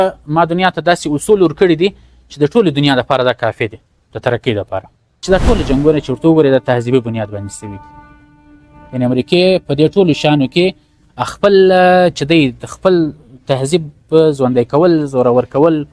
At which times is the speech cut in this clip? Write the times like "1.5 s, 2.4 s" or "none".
5.2 s